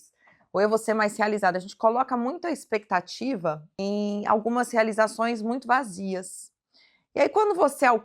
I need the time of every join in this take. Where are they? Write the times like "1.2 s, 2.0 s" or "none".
3.7 s